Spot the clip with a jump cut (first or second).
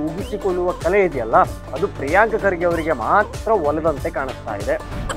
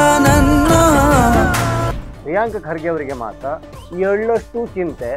second